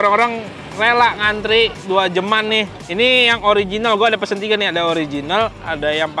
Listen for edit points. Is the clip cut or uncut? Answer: uncut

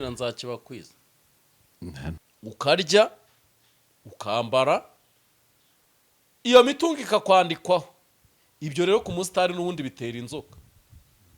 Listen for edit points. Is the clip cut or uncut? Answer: cut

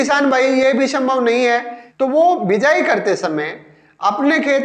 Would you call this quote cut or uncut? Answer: cut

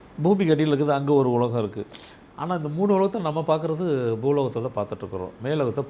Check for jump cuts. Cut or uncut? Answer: uncut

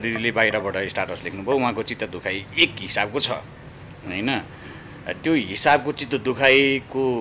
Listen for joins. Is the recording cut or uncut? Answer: uncut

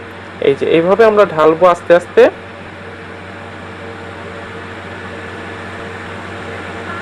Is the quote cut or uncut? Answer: uncut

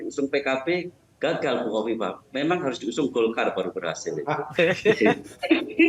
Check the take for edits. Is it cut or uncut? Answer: uncut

